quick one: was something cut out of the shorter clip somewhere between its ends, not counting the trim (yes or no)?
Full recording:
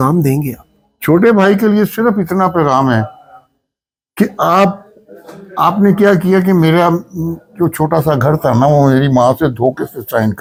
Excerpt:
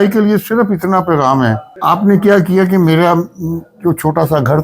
yes